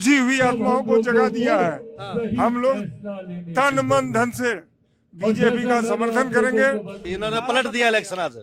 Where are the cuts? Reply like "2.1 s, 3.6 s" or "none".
7.0 s